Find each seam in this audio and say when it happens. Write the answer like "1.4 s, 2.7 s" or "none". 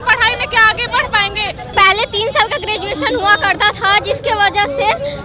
1.6 s